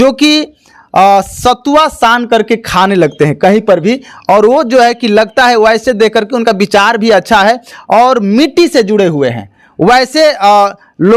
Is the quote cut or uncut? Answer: uncut